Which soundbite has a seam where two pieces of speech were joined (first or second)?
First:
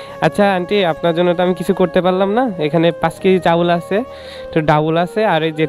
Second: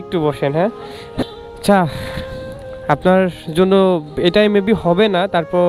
second